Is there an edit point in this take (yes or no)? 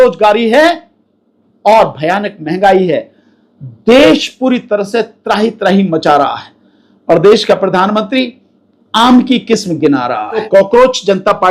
yes